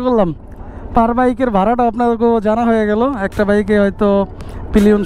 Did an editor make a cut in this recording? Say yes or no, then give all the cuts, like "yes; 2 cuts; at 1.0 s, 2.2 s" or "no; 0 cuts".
no; 0 cuts